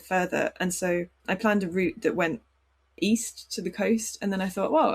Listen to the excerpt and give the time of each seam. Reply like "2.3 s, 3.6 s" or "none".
1.2 s